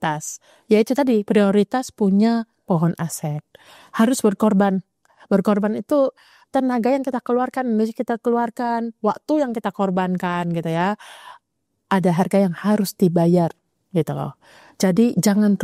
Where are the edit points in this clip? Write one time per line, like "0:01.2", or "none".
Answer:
none